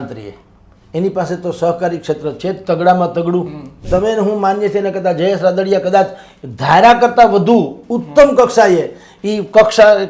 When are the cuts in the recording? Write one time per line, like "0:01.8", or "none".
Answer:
0:03.8